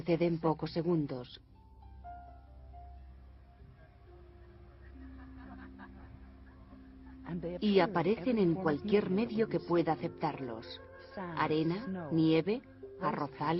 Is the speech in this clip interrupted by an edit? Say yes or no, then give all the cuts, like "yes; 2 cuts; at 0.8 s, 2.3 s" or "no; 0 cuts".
yes; 1 cut; at 5.4 s